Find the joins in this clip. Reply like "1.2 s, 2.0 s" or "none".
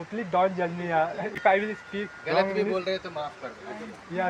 1.3 s